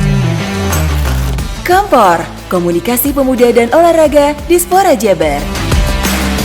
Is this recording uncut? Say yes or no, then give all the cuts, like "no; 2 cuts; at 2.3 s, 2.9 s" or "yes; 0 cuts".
yes; 0 cuts